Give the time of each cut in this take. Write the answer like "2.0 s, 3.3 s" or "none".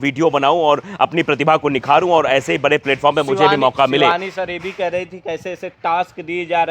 none